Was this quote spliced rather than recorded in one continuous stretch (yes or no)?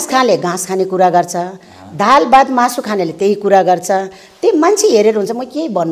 no